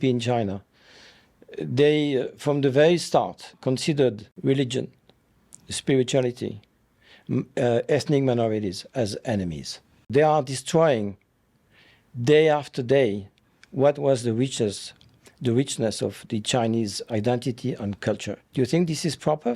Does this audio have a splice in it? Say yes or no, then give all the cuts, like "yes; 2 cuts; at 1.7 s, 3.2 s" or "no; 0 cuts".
yes; 3 cuts; at 4.3 s, 10.1 s, 18.4 s